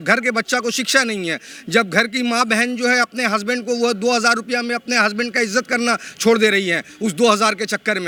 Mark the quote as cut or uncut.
uncut